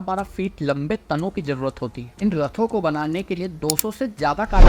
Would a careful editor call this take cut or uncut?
cut